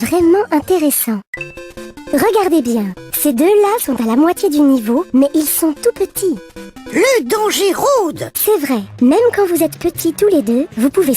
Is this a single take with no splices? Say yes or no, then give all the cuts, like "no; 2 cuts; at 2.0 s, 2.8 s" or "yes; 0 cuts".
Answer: no; 1 cut; at 8.4 s